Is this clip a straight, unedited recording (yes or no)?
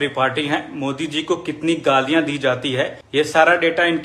yes